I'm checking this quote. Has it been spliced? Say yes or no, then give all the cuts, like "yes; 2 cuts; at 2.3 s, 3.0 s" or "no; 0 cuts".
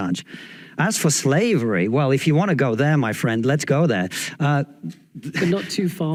no; 0 cuts